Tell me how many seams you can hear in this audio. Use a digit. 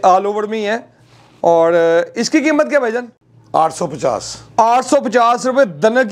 0